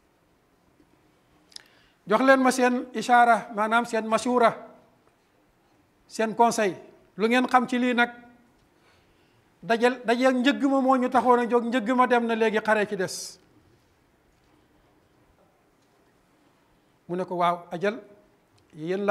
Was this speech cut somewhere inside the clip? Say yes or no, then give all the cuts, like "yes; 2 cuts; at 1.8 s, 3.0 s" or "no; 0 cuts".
yes; 1 cut; at 15.4 s